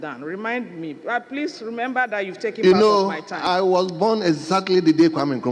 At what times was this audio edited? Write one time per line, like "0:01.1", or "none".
none